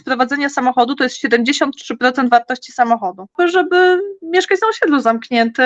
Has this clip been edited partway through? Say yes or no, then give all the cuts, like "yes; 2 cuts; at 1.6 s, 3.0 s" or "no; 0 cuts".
yes; 1 cut; at 3.3 s